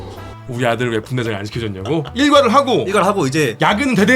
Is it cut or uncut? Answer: cut